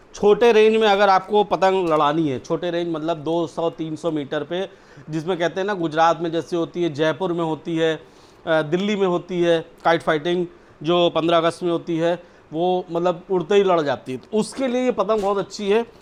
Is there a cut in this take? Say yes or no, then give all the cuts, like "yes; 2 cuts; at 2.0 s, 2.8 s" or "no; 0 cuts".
no; 0 cuts